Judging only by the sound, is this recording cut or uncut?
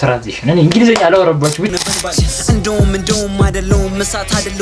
cut